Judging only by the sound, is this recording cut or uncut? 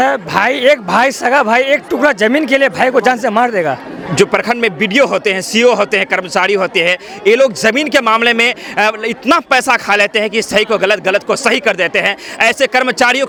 uncut